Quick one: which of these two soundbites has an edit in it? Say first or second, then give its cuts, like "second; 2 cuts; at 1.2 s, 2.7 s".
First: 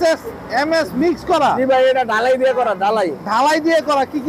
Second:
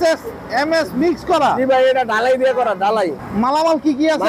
second; 1 cut; at 3.2 s